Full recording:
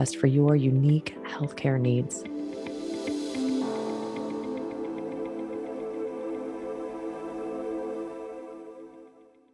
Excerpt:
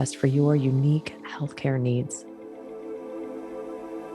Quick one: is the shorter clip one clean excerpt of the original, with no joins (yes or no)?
no